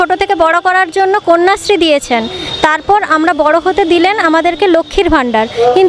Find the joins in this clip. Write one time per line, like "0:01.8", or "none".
none